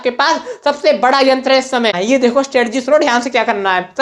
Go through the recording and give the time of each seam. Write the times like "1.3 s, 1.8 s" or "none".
2.0 s